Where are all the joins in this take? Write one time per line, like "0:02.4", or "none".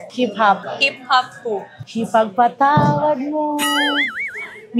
none